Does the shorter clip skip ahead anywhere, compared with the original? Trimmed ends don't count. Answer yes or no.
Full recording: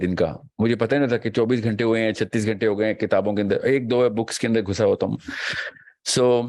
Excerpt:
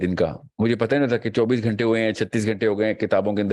no